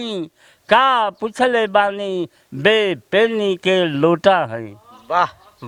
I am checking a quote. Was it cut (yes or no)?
no